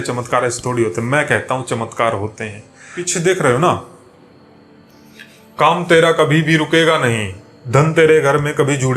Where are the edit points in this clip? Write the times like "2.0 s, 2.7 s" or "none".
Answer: 3.0 s